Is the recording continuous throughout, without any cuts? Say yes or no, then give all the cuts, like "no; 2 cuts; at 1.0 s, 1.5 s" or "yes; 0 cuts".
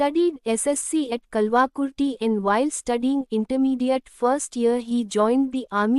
yes; 0 cuts